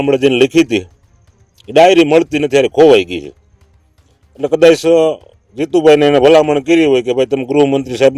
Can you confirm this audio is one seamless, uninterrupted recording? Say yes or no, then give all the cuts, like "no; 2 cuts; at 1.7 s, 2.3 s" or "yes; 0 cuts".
yes; 0 cuts